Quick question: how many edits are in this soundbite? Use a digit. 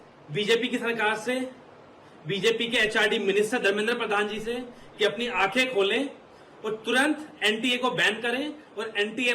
1